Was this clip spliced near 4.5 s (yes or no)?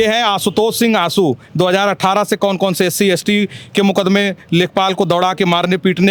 no